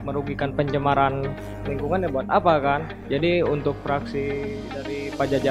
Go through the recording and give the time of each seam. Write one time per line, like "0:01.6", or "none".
none